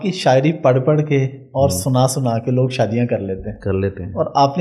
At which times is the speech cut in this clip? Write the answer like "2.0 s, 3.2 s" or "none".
none